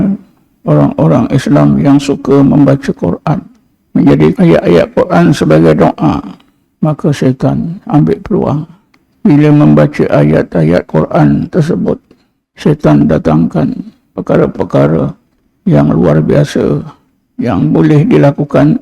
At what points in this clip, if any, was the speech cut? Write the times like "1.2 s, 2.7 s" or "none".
4.3 s